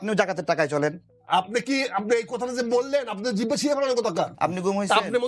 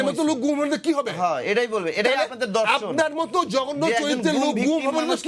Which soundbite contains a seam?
first; 2 cuts; at 1.1 s, 4.3 s

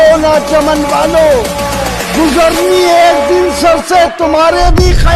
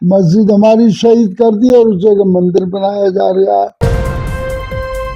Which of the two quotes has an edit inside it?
second; 1 cut; at 3.8 s

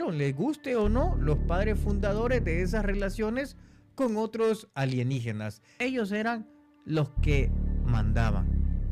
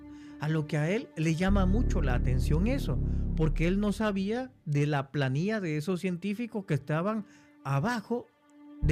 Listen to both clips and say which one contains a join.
first; 1 cut; at 5.6 s

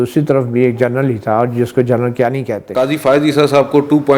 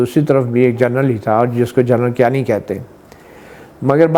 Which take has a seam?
first; 1 cut; at 2.7 s

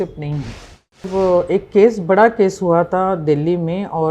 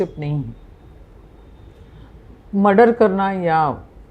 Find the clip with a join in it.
first; 1 cut; at 1.1 s

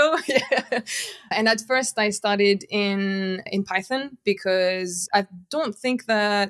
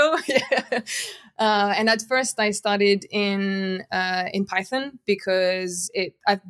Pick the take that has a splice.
first; 3 cuts; at 1.3 s, 3.5 s, 5.0 s

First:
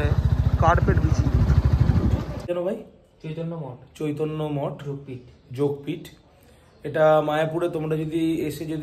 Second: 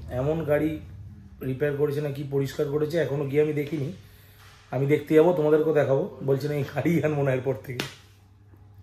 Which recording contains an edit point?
first; 1 cut; at 2.5 s

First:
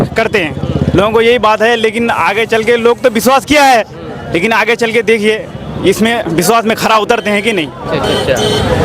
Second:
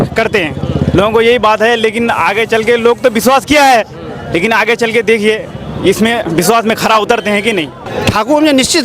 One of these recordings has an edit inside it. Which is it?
second; 1 cut; at 7.8 s

